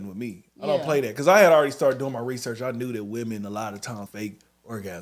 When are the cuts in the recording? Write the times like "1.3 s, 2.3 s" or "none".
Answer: 4.1 s